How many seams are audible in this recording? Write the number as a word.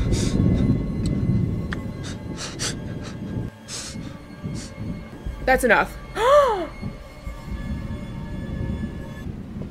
one